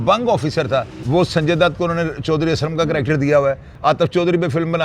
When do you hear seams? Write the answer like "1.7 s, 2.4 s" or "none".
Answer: 1.0 s, 3.7 s